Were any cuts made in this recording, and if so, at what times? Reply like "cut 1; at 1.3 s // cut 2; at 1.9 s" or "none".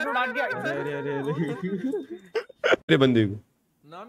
cut 1; at 2.9 s